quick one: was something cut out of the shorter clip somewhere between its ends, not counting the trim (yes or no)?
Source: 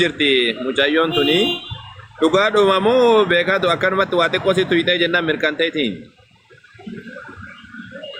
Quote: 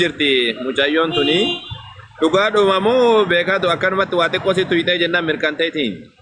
no